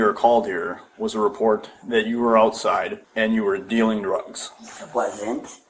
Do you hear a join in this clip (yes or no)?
no